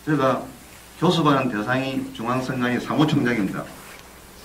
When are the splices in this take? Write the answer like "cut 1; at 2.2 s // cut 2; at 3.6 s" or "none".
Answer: cut 1; at 1.0 s